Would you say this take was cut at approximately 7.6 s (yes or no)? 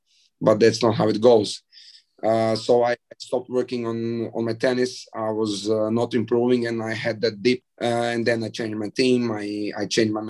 yes